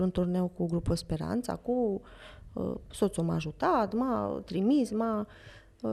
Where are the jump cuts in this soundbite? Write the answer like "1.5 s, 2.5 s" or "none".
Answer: none